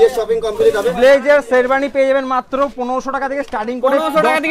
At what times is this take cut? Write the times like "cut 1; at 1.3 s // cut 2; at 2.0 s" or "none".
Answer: cut 1; at 0.9 s

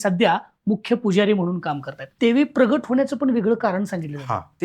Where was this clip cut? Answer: cut 1; at 2.1 s

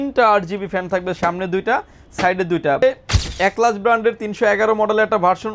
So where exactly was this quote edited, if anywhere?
cut 1; at 2.8 s

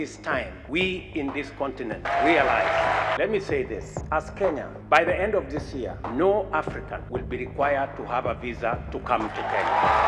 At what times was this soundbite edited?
cut 1; at 2.0 s // cut 2; at 3.2 s

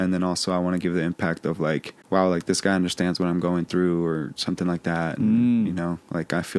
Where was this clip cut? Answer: cut 1; at 1.9 s

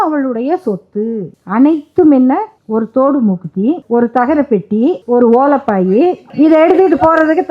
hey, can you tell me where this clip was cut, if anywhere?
cut 1; at 1.3 s // cut 2; at 2.6 s // cut 3; at 3.8 s // cut 4; at 5.0 s // cut 5; at 6.2 s

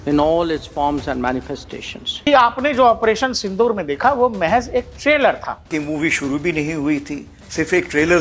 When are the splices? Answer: cut 1; at 2.1 s // cut 2; at 5.7 s

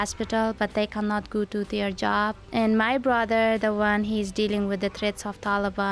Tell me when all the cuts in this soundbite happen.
cut 1; at 2.4 s

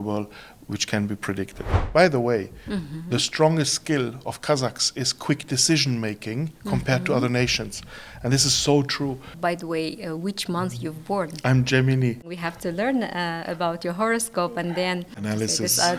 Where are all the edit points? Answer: cut 1; at 1.8 s // cut 2; at 9.3 s // cut 3; at 12.3 s // cut 4; at 15.2 s

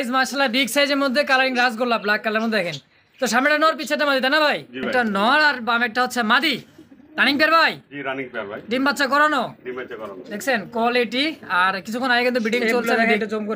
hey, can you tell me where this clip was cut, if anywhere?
cut 1; at 4.9 s // cut 2; at 12.8 s

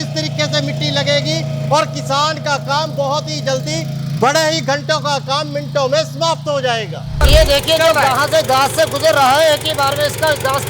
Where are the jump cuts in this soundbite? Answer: cut 1; at 7.1 s

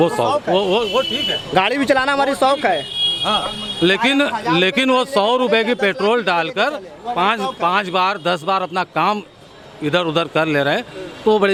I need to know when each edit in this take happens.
none

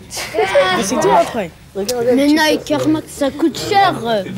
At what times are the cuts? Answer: none

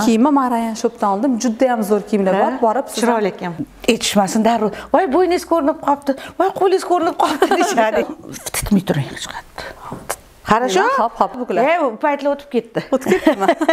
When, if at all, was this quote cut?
cut 1; at 3.5 s // cut 2; at 8.0 s // cut 3; at 11.4 s

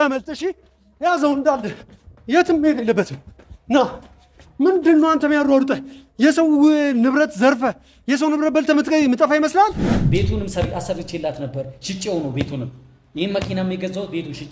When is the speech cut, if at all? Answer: cut 1; at 9.9 s

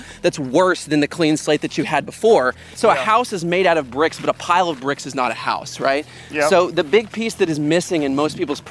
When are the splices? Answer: cut 1; at 2.7 s

